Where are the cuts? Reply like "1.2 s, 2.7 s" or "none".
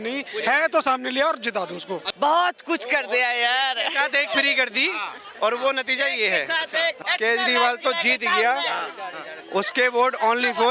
2.1 s, 7.0 s